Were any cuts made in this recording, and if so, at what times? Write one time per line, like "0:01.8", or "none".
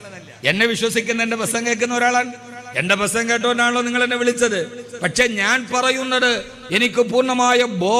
none